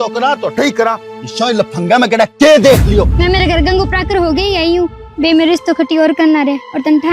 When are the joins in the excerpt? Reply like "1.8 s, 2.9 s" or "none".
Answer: 3.1 s

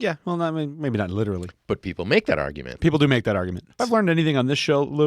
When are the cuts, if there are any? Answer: 1.5 s, 3.7 s

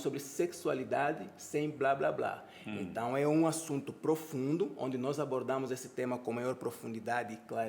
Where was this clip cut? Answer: none

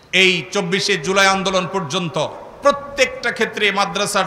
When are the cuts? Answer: none

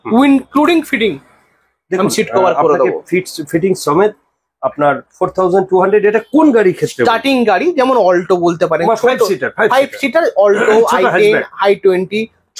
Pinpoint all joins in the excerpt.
none

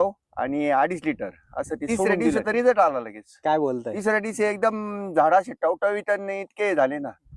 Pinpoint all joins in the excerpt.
2.4 s

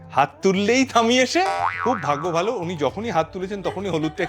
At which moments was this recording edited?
1.5 s

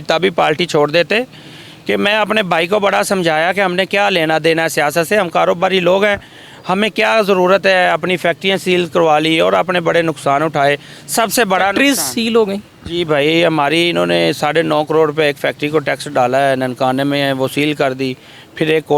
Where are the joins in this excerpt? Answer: none

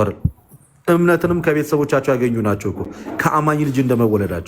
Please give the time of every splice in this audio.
none

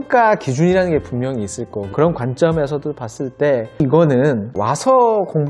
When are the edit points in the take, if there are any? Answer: 4.5 s

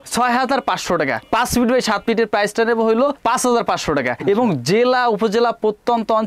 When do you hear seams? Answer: none

